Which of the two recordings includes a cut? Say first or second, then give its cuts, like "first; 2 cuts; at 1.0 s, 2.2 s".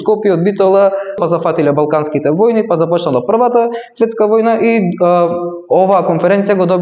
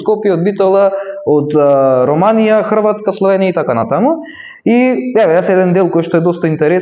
first; 1 cut; at 1.2 s